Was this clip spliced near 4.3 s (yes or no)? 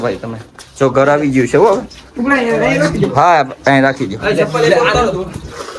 no